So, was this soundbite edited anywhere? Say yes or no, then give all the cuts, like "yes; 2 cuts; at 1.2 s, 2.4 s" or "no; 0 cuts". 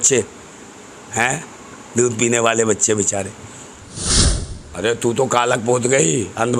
yes; 1 cut; at 4.1 s